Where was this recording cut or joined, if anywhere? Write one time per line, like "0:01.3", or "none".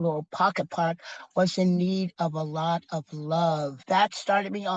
0:03.8